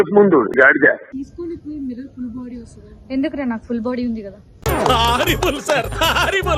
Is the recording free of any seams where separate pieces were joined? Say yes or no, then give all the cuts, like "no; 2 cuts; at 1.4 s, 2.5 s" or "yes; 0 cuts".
no; 1 cut; at 1.2 s